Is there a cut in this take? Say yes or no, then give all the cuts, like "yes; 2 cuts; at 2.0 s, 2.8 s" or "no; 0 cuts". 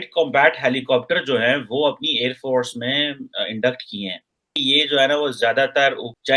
no; 0 cuts